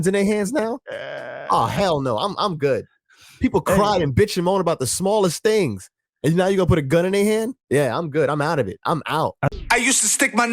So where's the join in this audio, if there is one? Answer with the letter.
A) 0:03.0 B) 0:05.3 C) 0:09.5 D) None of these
C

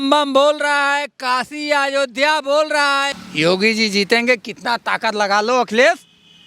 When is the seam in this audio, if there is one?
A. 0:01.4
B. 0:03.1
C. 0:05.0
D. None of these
B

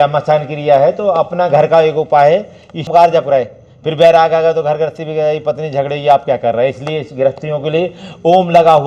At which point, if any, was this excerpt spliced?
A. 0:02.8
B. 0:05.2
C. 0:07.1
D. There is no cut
A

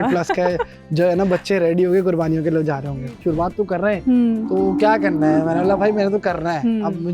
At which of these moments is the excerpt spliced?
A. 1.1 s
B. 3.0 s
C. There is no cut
B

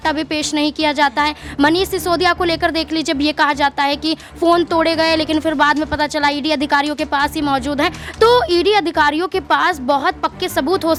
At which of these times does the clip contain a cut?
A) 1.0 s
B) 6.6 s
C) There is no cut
C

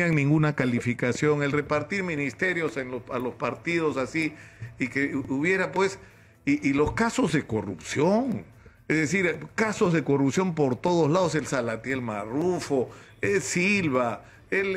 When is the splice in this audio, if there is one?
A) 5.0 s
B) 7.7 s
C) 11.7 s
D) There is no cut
D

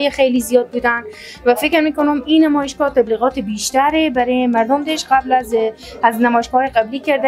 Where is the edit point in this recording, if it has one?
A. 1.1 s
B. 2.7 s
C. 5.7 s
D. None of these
D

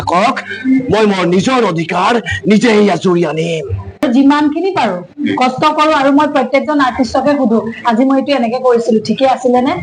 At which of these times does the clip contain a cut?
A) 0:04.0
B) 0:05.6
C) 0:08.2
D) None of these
A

